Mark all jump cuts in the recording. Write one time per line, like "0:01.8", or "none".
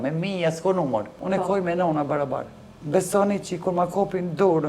0:01.2